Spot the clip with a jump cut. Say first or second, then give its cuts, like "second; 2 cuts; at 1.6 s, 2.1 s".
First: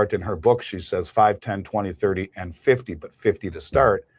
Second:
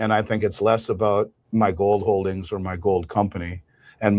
second; 1 cut; at 1.4 s